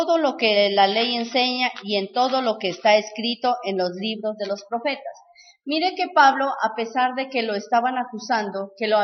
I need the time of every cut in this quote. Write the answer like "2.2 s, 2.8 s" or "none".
4.4 s